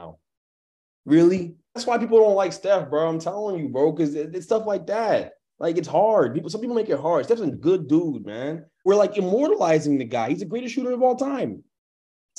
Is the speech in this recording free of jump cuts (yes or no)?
no